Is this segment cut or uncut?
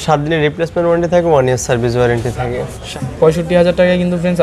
cut